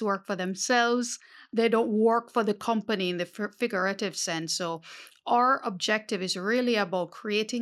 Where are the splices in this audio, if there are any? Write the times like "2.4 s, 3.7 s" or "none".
1.4 s